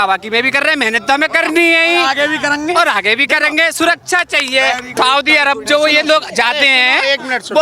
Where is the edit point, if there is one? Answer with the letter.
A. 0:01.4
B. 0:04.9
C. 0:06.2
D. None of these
B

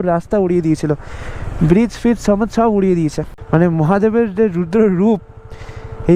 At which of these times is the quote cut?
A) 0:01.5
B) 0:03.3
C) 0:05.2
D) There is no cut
B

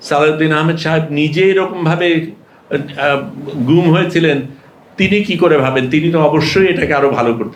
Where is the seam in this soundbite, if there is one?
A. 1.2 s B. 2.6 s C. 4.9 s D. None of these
D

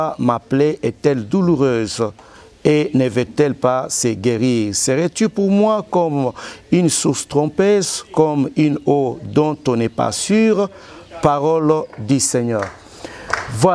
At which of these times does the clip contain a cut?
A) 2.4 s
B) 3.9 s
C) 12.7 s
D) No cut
D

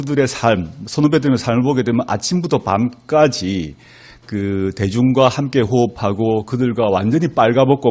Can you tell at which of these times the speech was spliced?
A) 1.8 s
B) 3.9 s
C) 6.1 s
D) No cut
A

